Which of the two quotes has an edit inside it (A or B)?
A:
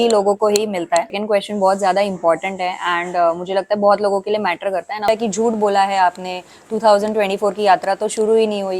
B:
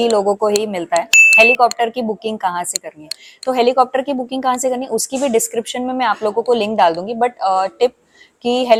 A